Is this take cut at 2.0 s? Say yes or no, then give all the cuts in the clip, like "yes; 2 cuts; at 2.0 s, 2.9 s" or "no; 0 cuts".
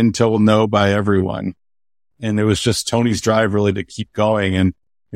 yes; 1 cut; at 2.0 s